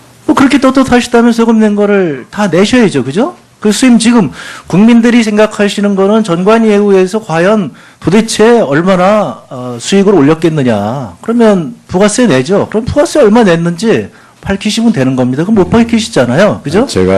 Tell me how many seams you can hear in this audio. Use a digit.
1